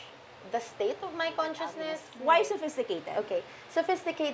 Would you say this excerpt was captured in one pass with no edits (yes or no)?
no